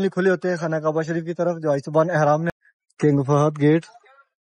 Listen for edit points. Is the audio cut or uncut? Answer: cut